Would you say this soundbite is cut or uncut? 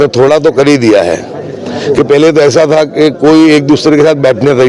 uncut